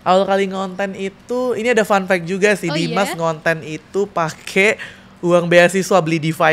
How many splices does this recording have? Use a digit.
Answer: 0